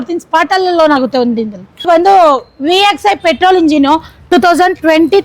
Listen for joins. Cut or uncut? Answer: cut